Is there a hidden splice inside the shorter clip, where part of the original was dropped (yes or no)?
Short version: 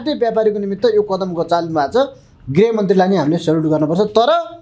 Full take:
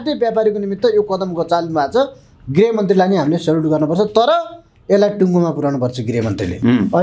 no